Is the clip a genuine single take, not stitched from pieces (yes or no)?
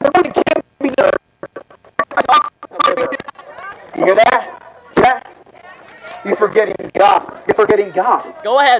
no